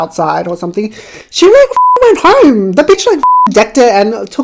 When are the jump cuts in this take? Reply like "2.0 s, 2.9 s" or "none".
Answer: none